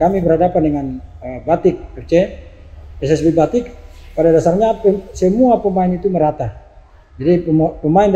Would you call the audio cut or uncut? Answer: uncut